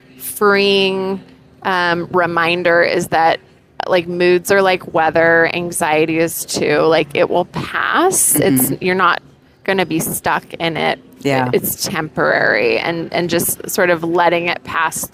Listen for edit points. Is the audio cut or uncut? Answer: uncut